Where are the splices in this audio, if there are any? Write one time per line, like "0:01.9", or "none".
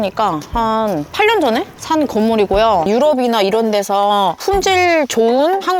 0:02.8